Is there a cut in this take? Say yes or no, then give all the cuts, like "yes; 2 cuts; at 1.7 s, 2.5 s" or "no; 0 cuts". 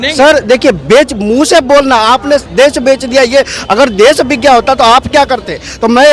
no; 0 cuts